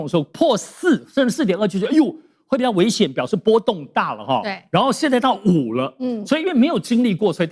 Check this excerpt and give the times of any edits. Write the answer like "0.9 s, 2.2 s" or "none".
none